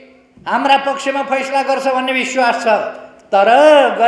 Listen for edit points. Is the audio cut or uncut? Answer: uncut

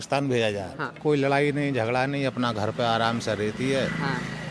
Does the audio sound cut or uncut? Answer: cut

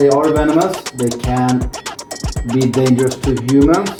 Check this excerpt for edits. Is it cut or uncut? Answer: uncut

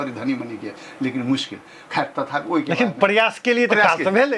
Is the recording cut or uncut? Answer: uncut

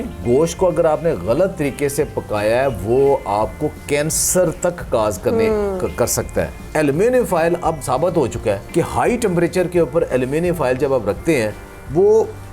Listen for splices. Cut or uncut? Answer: cut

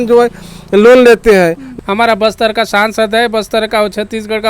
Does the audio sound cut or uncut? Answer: cut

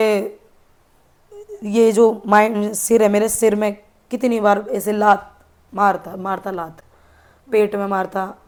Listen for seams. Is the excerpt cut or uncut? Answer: uncut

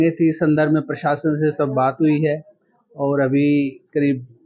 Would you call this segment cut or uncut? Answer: uncut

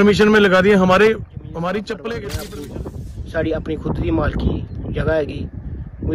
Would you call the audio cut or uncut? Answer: cut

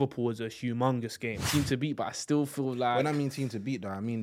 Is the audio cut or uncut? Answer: cut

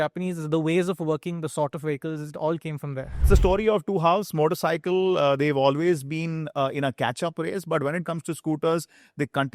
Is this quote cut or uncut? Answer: cut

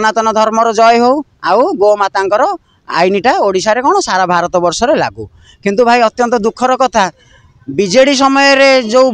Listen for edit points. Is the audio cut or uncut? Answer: uncut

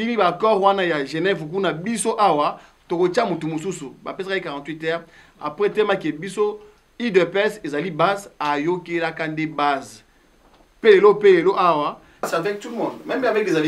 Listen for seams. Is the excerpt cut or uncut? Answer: cut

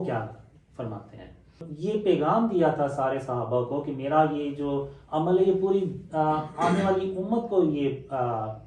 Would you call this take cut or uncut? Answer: cut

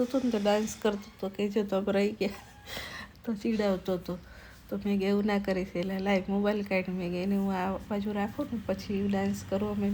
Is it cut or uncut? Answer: uncut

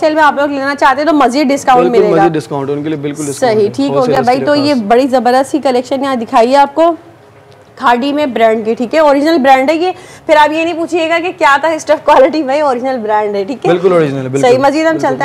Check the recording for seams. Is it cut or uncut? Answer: uncut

